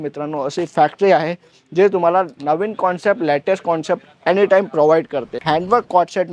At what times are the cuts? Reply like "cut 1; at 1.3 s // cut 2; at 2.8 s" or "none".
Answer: cut 1; at 5.4 s